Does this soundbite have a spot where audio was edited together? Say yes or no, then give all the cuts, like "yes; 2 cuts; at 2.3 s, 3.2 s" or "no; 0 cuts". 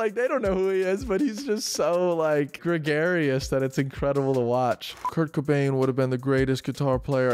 yes; 2 cuts; at 2.6 s, 5.1 s